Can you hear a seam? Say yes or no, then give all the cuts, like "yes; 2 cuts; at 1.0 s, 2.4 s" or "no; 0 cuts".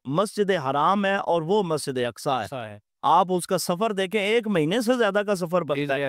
no; 0 cuts